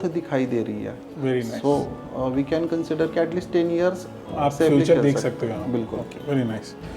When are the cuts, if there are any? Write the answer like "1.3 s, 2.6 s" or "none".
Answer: none